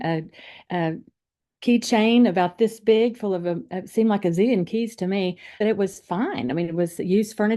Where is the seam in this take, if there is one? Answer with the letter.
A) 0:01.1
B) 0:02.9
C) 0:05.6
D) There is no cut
C